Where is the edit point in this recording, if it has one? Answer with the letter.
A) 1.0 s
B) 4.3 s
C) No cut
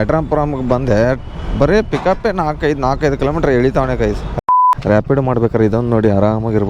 B